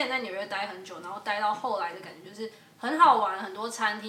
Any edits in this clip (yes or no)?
no